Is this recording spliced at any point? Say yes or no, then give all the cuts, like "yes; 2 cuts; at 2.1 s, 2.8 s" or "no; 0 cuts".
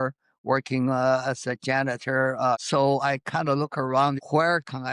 yes; 2 cuts; at 2.6 s, 4.2 s